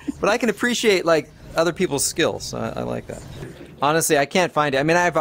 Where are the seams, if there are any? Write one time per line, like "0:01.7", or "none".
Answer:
none